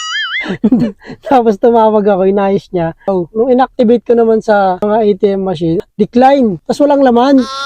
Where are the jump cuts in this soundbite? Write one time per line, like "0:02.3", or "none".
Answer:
0:03.0
0:04.8
0:05.8
0:06.6